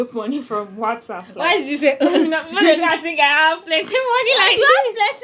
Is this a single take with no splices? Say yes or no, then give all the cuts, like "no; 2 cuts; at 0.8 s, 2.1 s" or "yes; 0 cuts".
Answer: yes; 0 cuts